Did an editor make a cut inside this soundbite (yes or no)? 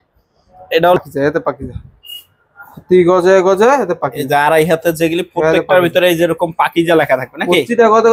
yes